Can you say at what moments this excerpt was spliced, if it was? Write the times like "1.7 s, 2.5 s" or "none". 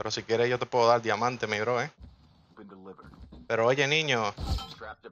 2.4 s